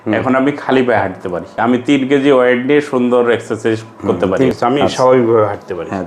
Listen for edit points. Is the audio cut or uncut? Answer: cut